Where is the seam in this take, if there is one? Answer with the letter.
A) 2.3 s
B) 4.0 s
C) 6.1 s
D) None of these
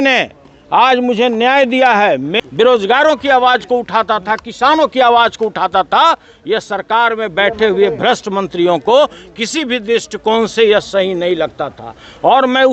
A